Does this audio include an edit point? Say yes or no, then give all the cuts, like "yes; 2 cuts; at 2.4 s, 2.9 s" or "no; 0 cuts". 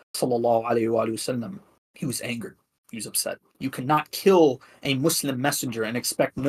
yes; 1 cut; at 3.4 s